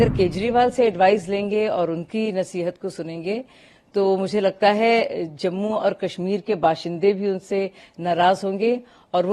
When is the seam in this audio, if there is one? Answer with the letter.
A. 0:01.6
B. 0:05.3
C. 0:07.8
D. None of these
D